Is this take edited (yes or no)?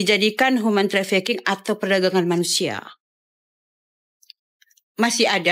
no